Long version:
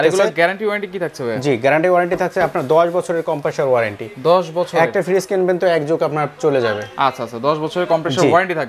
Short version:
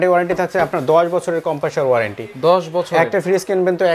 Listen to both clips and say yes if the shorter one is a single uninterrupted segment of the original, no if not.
yes